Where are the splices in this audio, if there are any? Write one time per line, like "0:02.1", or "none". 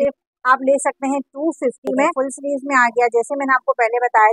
0:02.1